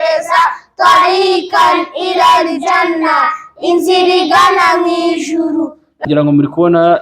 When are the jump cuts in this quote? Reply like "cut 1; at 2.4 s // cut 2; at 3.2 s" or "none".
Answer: cut 1; at 6.1 s